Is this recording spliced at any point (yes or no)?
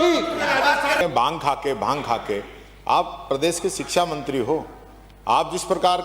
yes